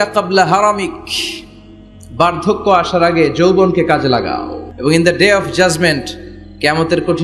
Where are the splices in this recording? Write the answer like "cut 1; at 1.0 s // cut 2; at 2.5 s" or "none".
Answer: cut 1; at 4.8 s